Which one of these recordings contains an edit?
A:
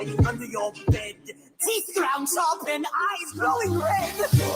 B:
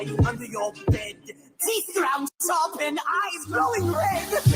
A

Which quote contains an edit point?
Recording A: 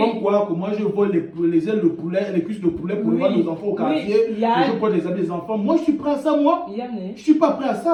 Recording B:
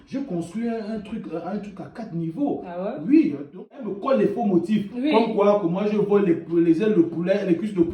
B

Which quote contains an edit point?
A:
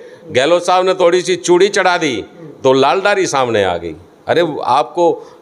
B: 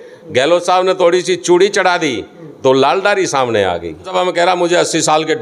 B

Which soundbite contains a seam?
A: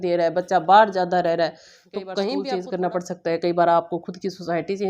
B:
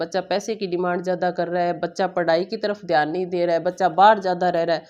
A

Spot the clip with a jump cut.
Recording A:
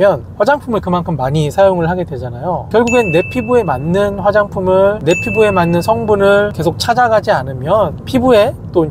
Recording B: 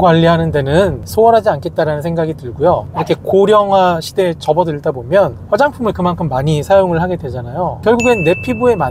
B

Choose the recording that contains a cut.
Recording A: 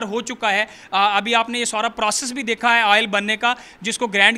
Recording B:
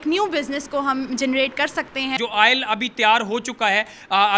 B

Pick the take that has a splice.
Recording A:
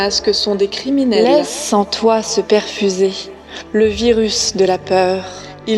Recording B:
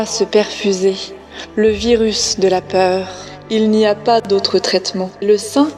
A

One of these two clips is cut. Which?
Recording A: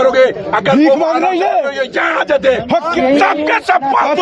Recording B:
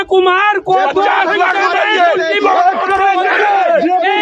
A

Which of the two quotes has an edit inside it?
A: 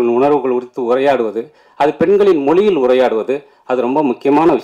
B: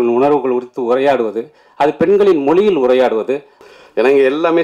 B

